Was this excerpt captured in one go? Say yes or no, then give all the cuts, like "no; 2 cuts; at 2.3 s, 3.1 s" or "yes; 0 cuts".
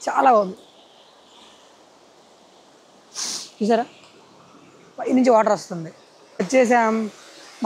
no; 1 cut; at 6.3 s